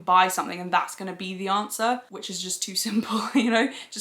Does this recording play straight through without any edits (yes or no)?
yes